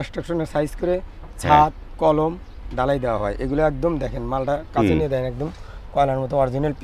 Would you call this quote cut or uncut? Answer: uncut